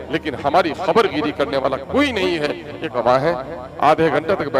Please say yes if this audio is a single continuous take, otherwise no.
no